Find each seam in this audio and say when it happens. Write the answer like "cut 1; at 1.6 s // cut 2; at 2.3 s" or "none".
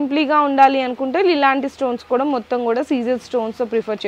none

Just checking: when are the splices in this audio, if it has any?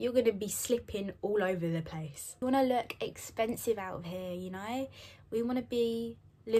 cut 1; at 2.4 s

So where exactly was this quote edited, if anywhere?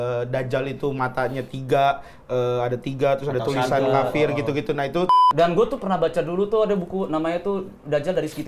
cut 1; at 5.1 s

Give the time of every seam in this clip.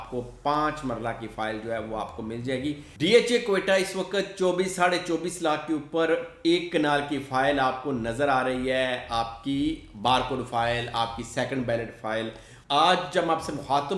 cut 1; at 2.9 s // cut 2; at 12.5 s

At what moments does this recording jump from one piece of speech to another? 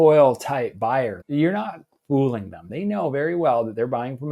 cut 1; at 1.2 s // cut 2; at 2.6 s

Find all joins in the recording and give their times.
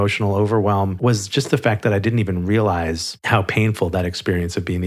cut 1; at 0.9 s

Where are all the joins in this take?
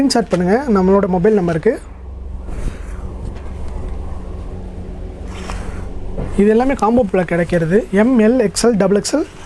none

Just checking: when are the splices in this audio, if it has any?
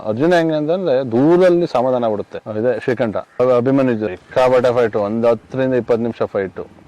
cut 1; at 2.3 s // cut 2; at 3.4 s

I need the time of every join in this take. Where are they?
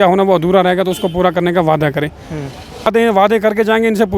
cut 1; at 2.9 s

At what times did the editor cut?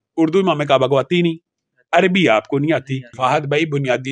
cut 1; at 3.1 s

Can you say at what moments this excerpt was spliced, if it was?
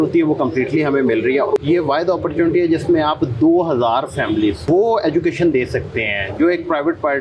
cut 1; at 1.6 s // cut 2; at 4.6 s

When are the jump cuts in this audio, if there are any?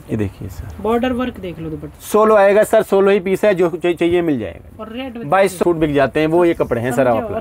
cut 1; at 1.9 s // cut 2; at 5.6 s

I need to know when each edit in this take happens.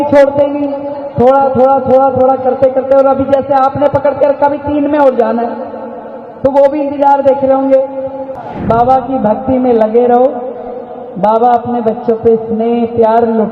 cut 1; at 8.3 s

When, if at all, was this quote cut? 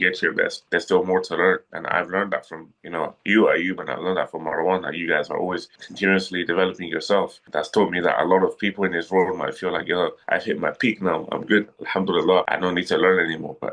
cut 1; at 12.5 s

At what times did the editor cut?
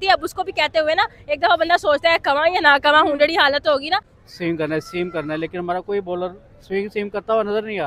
cut 1; at 4.1 s

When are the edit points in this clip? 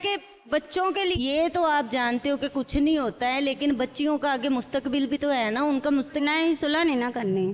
cut 1; at 1.1 s // cut 2; at 6.2 s

